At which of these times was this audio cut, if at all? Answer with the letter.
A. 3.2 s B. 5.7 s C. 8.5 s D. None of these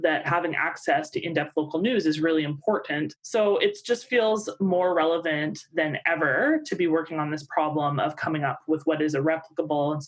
A